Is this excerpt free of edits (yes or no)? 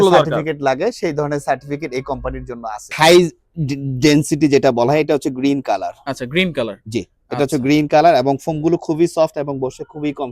no